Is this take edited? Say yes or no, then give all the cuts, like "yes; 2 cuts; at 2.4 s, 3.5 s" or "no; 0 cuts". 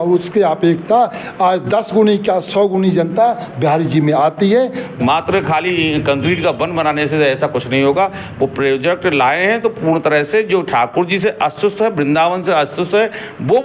yes; 1 cut; at 4.8 s